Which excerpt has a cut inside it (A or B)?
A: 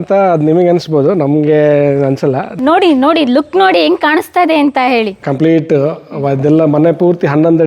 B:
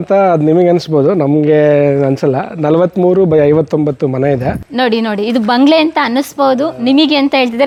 A